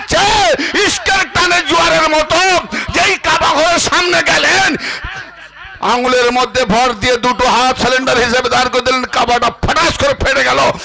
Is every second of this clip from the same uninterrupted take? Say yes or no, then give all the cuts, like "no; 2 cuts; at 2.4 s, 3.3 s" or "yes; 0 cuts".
yes; 0 cuts